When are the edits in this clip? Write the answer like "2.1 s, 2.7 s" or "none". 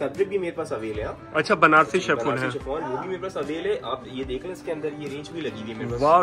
none